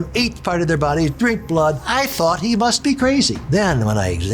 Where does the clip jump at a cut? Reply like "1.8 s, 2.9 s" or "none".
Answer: 1.8 s, 3.4 s